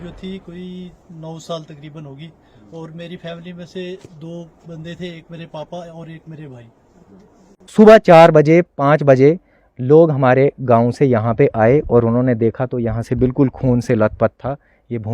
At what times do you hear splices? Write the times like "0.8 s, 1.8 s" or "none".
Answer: 7.7 s